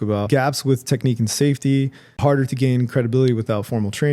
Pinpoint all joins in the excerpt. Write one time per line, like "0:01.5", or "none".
0:02.2